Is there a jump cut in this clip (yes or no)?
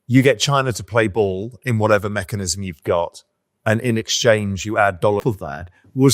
yes